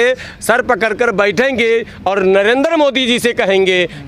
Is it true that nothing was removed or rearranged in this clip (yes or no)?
yes